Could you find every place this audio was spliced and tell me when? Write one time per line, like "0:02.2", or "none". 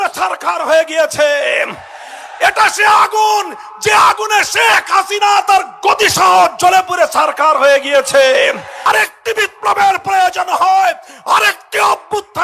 0:08.7